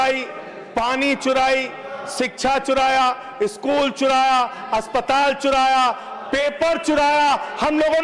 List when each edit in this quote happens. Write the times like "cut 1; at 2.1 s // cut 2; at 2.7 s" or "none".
none